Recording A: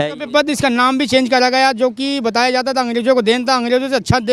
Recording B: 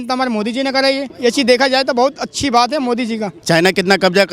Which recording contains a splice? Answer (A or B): B